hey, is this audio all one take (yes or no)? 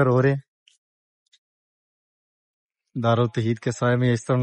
yes